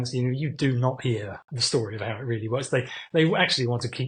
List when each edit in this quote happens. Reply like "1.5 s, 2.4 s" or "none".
none